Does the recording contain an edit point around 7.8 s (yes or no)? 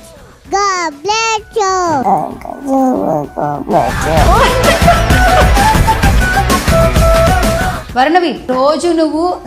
no